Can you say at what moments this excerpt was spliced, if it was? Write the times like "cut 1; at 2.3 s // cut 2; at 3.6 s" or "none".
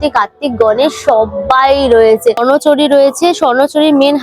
cut 1; at 2.4 s